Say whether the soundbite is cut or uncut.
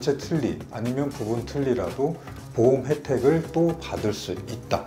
uncut